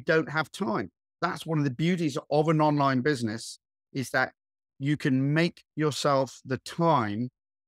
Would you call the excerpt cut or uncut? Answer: cut